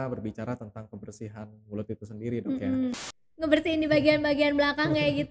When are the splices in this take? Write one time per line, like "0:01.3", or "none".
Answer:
0:03.1